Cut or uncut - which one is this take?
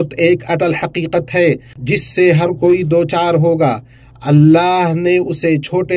cut